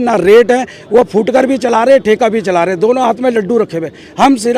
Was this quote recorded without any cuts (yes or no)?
yes